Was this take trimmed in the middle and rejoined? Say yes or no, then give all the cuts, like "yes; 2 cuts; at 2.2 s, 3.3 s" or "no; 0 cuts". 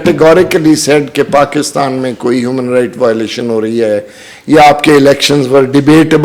no; 0 cuts